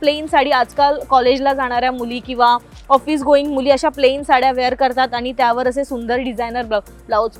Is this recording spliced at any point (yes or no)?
no